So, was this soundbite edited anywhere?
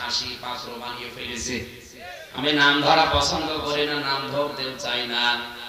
yes; 1 cut; at 2.5 s

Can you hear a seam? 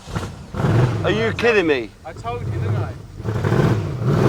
no; 0 cuts

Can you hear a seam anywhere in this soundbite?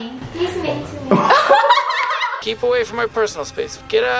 yes; 1 cut; at 2.3 s

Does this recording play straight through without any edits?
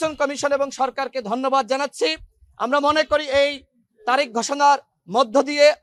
yes; 0 cuts

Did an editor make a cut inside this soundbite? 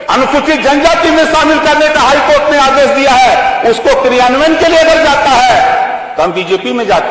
no; 0 cuts

